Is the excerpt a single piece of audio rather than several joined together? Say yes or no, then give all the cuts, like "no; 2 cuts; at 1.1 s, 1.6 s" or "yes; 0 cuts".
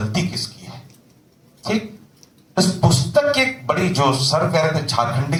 yes; 0 cuts